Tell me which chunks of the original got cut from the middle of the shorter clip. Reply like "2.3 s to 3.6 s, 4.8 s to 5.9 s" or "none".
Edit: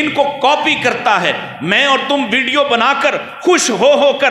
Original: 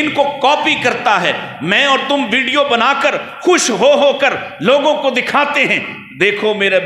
none